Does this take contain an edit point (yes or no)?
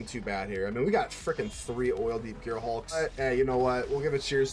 yes